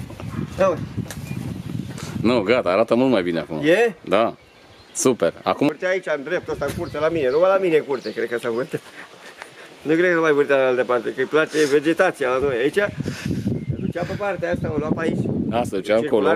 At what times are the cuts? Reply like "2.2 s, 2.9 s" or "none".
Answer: 5.7 s